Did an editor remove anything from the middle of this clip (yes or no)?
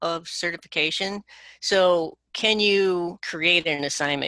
yes